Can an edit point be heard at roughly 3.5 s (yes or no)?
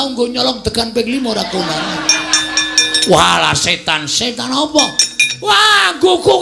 no